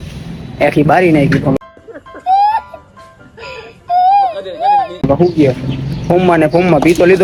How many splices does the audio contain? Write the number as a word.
zero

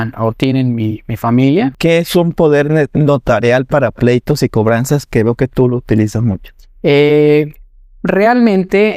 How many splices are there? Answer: one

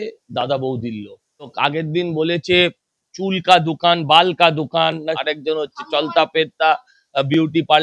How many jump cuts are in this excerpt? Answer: two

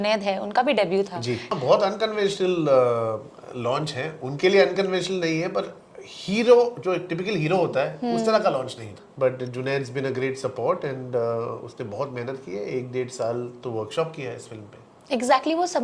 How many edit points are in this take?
two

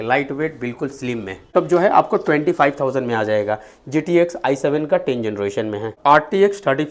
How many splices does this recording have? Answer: two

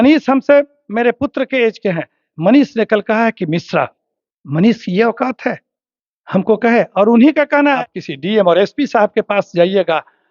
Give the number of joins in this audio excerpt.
one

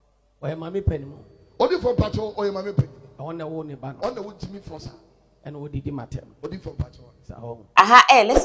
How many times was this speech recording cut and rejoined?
zero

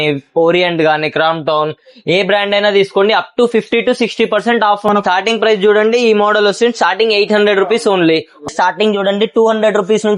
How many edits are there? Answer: two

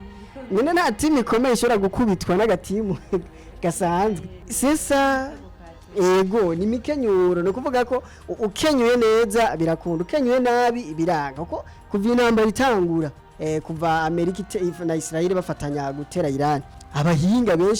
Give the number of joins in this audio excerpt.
two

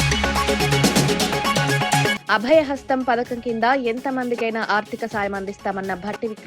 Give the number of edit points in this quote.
one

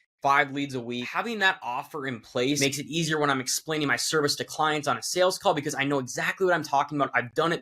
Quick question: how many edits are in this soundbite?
two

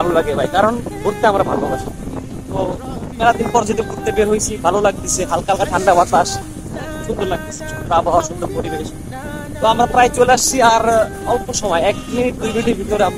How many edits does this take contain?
zero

